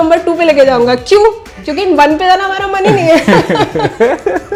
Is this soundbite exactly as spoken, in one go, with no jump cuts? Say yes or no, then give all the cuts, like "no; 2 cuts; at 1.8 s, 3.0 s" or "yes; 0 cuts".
yes; 0 cuts